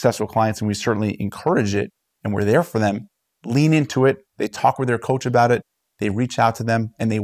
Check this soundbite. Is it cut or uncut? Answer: uncut